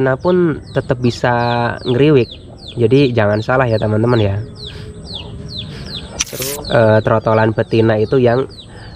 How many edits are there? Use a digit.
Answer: 1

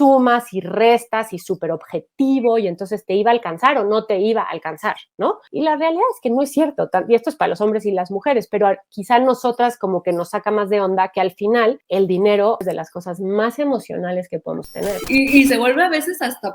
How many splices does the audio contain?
3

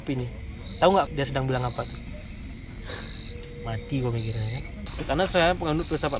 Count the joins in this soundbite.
3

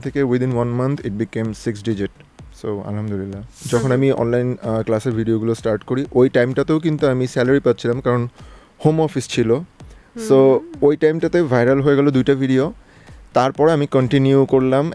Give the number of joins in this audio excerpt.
1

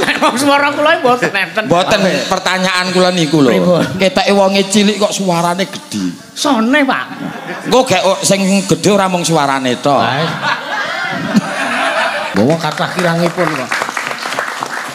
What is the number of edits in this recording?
1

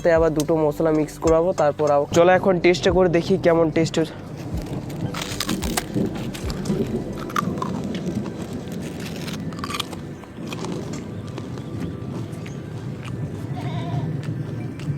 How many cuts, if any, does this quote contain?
1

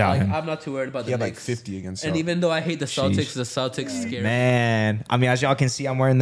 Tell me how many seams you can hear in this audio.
1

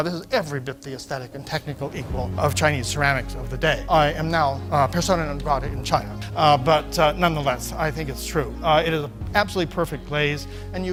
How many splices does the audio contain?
0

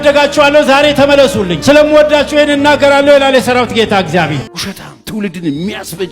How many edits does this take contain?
1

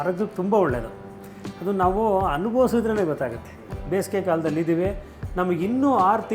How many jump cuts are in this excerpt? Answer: 1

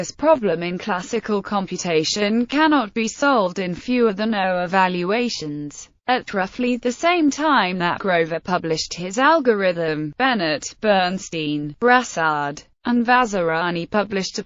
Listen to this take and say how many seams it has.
0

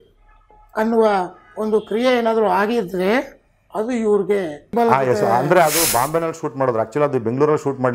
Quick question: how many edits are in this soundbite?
1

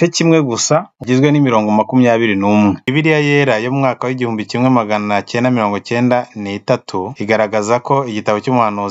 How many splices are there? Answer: 2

